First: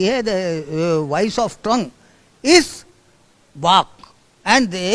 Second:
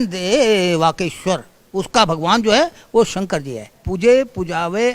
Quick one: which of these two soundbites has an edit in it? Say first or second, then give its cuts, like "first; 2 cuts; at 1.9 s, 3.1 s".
second; 1 cut; at 3.8 s